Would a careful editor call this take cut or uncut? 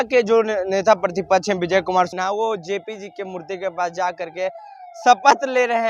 cut